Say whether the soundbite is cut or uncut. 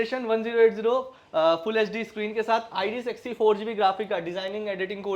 uncut